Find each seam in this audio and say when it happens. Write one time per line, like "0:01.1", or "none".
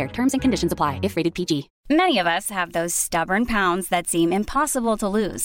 0:01.7